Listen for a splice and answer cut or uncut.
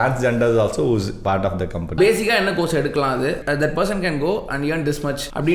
cut